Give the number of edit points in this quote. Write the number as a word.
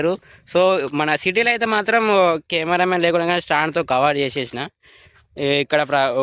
zero